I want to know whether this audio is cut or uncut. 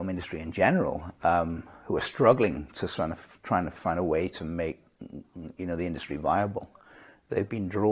uncut